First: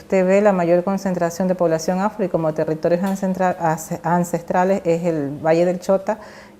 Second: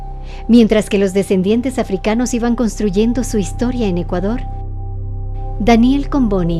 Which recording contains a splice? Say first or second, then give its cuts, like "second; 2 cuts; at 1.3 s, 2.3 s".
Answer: first; 1 cut; at 5.0 s